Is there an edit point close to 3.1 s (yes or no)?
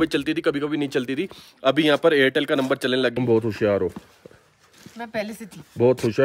yes